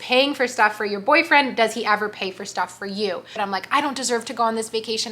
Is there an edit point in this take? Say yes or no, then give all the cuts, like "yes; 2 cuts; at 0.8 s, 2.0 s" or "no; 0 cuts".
yes; 1 cut; at 3.4 s